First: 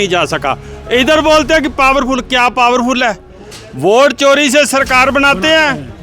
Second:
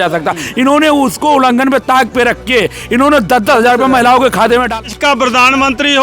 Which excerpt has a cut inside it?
second; 1 cut; at 4.8 s

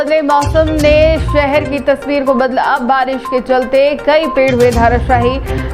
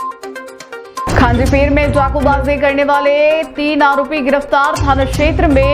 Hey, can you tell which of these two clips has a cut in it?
second; 1 cut; at 1.1 s

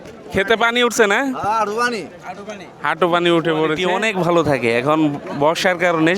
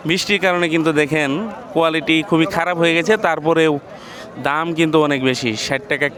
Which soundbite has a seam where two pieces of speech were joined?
first; 1 cut; at 3.8 s

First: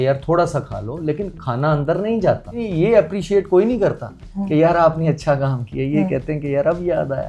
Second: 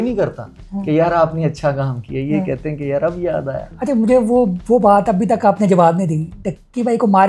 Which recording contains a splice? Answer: first; 1 cut; at 2.6 s

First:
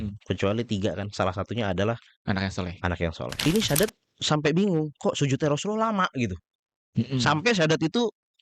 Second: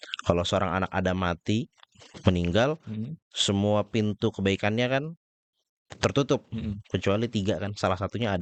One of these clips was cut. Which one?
first; 1 cut; at 3.5 s

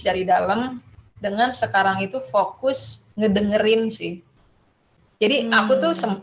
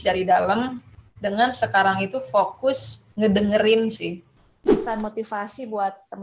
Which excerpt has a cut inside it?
second; 1 cut; at 4.8 s

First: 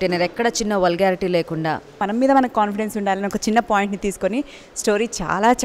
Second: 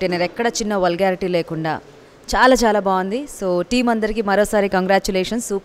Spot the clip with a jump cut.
first; 1 cut; at 2.0 s

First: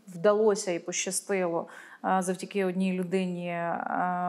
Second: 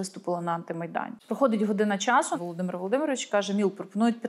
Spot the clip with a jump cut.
second; 2 cuts; at 1.1 s, 2.3 s

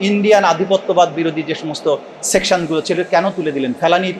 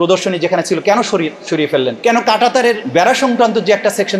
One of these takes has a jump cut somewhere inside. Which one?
second; 2 cuts; at 1.9 s, 2.8 s

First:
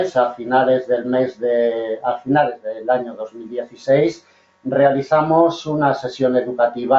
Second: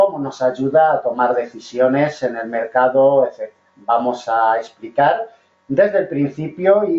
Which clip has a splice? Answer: second; 1 cut; at 1.6 s

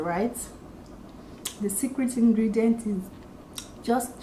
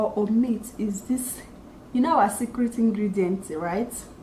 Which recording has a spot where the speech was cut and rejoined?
first; 1 cut; at 3.1 s

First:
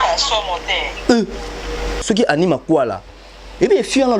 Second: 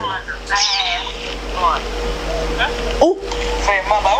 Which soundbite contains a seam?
first; 1 cut; at 1.9 s

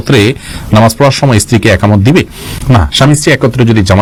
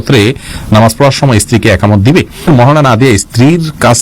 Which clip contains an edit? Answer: second; 1 cut; at 2.5 s

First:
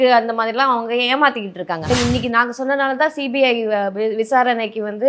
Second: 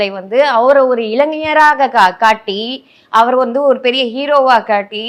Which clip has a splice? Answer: first; 1 cut; at 1.9 s

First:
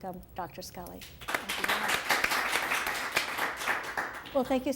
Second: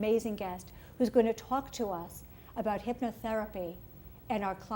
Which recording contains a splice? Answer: first; 1 cut; at 1.2 s

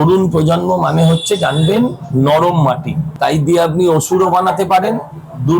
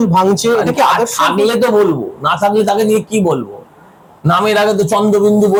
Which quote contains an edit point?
first; 1 cut; at 3.1 s

